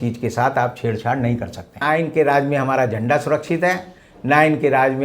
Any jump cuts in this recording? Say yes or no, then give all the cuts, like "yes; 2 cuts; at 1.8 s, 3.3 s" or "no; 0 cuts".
yes; 1 cut; at 1.8 s